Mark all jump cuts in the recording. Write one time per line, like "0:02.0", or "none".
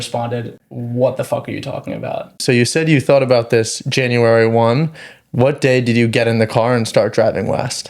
0:02.4